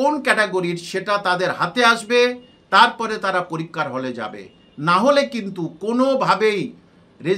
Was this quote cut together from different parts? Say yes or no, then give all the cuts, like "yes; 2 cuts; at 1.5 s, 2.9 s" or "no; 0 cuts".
no; 0 cuts